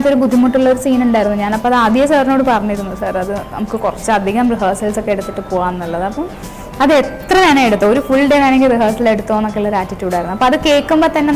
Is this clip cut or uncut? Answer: uncut